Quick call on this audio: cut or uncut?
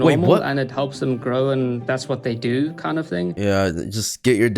cut